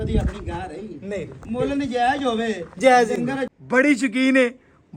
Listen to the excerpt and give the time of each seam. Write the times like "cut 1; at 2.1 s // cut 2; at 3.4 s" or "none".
cut 1; at 3.5 s